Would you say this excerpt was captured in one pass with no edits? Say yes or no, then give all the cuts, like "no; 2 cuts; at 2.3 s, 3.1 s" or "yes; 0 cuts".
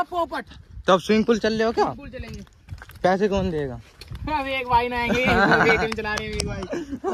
yes; 0 cuts